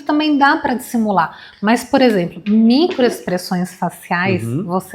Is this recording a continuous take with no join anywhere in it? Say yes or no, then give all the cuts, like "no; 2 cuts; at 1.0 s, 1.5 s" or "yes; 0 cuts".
yes; 0 cuts